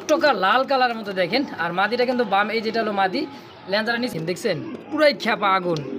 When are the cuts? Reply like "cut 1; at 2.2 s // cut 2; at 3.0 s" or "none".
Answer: cut 1; at 4.1 s